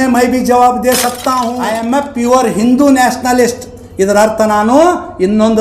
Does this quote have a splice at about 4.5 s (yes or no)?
no